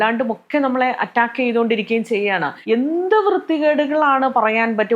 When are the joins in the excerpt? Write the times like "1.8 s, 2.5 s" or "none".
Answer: 2.5 s